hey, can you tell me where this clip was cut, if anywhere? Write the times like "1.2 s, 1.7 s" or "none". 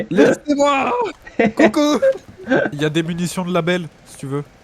2.7 s